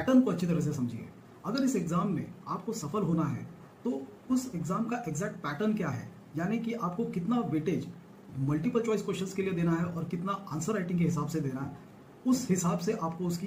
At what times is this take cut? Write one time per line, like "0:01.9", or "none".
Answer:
none

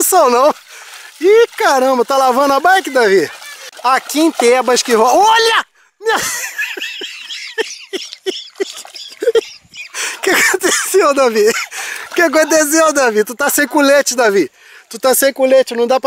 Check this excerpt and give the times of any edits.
0:03.7

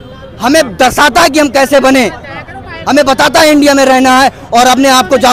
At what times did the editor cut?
none

